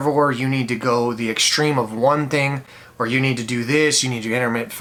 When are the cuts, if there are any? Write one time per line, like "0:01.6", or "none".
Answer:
none